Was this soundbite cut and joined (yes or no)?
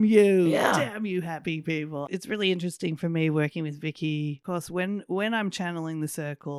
yes